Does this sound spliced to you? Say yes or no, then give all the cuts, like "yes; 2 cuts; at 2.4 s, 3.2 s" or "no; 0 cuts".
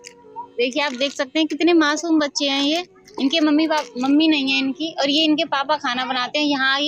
no; 0 cuts